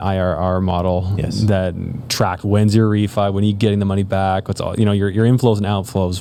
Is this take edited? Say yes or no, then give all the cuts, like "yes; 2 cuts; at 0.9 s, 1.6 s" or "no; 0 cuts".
no; 0 cuts